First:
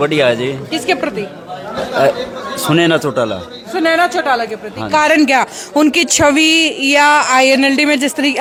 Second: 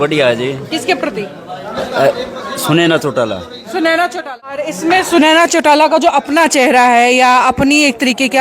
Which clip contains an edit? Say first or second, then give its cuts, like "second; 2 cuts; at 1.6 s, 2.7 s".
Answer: second; 1 cut; at 4.7 s